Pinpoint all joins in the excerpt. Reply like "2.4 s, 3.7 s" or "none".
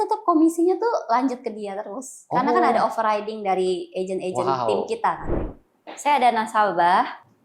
5.3 s